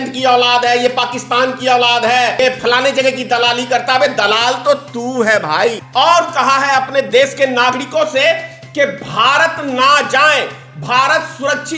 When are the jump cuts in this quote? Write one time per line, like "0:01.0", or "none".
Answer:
0:02.4
0:05.8